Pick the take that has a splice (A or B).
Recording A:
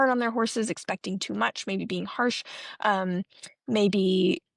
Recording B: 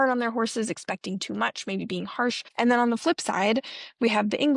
B